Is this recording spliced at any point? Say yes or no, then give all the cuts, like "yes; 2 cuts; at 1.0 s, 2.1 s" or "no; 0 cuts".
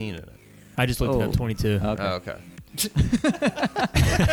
no; 0 cuts